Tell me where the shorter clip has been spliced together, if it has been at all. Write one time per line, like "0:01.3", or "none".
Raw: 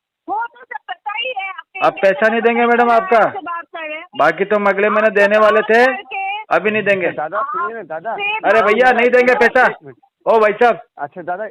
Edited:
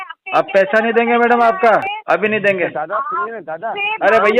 0:01.9